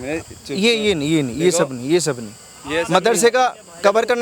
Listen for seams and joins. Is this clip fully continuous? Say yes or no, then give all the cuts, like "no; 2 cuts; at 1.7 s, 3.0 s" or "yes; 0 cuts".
yes; 0 cuts